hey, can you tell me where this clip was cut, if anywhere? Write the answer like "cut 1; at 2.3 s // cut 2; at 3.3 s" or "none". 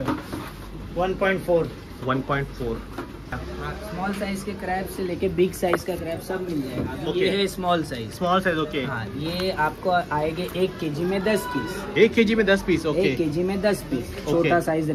cut 1; at 3.3 s